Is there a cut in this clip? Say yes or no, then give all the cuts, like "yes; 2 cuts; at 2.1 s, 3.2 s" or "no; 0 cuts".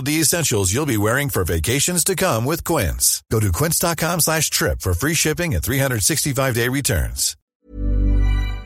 yes; 1 cut; at 7.4 s